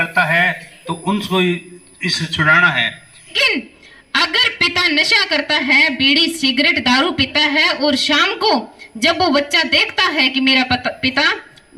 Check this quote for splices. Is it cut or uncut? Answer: cut